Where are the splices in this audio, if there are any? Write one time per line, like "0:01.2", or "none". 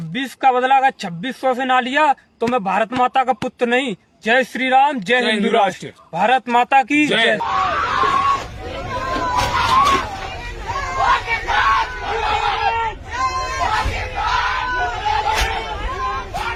none